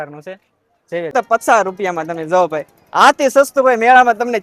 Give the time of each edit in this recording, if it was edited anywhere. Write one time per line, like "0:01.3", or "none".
0:01.1